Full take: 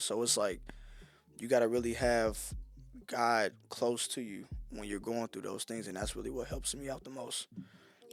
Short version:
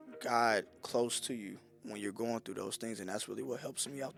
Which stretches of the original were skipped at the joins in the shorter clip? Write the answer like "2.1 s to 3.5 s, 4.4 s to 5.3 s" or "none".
none